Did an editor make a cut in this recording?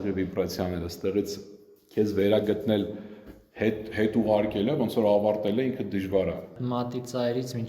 yes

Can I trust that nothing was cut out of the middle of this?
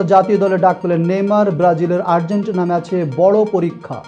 yes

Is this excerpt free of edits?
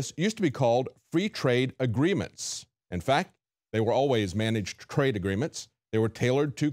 no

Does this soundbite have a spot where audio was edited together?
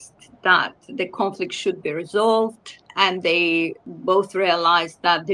yes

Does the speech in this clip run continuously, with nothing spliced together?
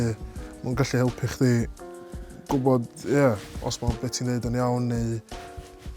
yes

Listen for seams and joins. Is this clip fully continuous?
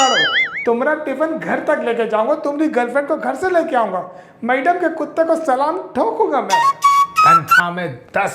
yes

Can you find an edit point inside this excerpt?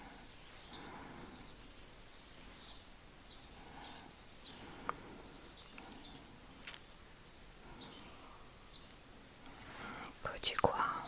no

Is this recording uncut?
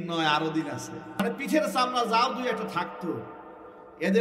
no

